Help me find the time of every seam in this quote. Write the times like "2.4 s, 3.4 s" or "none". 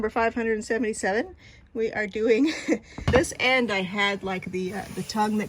3.1 s